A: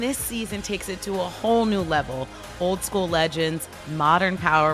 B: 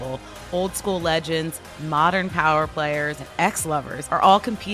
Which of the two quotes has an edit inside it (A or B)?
B